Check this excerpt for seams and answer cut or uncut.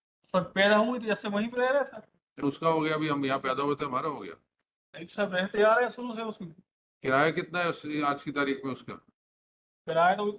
cut